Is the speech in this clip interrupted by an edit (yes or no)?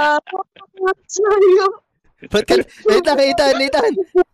no